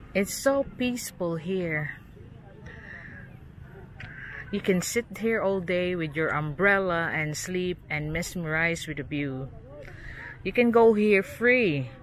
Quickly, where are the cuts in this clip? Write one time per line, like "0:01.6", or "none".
none